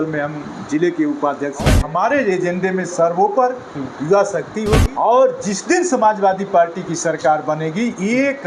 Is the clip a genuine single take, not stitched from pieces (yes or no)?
no